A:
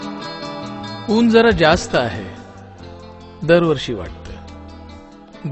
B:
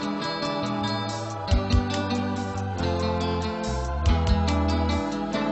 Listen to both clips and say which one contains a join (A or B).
A